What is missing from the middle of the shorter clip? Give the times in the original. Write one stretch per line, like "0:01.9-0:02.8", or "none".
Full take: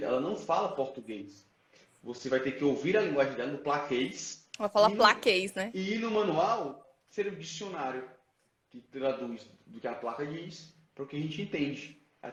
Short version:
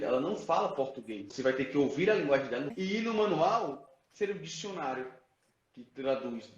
0:01.2-0:02.1
0:03.6-0:05.7